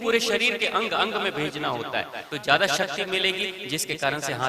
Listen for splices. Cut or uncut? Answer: cut